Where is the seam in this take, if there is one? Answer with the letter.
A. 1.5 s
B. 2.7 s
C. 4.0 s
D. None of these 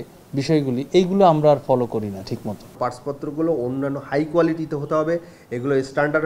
B